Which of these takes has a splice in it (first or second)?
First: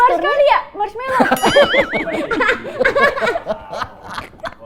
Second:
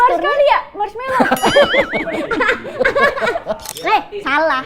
second